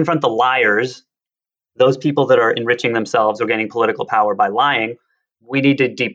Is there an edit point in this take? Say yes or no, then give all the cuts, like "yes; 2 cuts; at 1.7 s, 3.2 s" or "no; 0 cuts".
no; 0 cuts